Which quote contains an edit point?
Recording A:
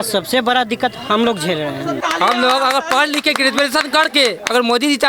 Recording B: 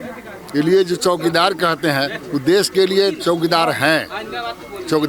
A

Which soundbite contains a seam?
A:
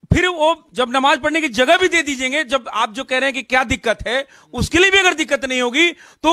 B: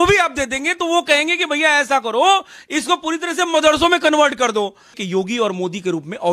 B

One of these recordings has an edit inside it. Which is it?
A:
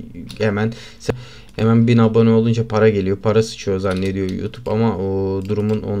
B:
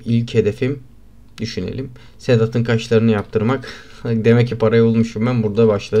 A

